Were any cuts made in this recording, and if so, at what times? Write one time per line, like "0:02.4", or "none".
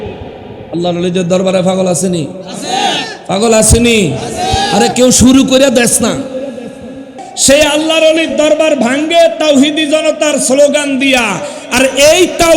0:07.3